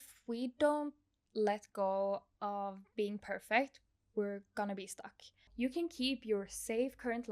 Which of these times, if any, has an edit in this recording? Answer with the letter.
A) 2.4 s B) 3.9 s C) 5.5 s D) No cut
C